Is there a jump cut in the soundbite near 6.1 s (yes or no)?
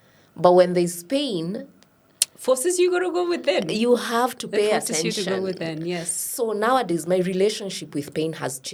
no